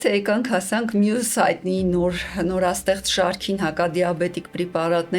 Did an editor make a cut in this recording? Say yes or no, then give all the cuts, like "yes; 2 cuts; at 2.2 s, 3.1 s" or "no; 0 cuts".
no; 0 cuts